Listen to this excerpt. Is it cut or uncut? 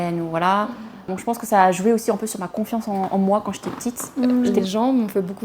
cut